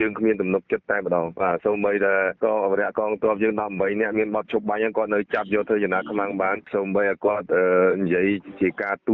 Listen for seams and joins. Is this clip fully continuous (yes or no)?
no